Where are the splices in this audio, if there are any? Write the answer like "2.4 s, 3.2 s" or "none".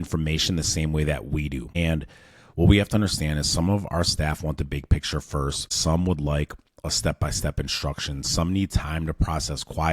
1.7 s, 5.7 s